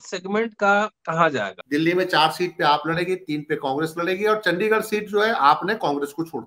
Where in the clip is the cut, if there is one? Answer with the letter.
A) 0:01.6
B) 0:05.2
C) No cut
A